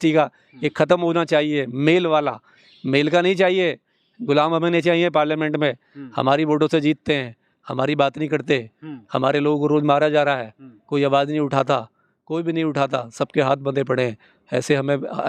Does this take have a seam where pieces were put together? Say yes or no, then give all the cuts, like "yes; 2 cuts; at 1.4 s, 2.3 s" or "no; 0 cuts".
no; 0 cuts